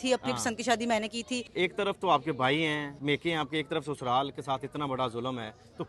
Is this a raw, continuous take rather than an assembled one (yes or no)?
no